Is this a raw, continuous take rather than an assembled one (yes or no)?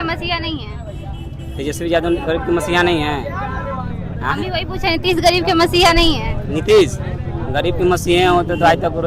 yes